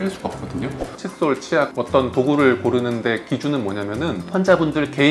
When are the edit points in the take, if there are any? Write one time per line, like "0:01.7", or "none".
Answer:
0:00.9